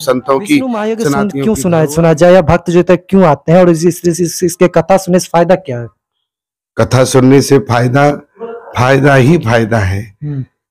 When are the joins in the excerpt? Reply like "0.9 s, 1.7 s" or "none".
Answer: 1.0 s